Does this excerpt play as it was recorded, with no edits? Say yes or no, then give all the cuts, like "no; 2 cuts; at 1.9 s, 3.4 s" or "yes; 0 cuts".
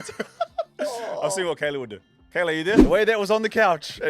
no; 1 cut; at 2.8 s